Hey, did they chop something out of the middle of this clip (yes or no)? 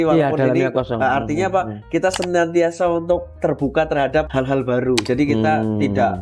yes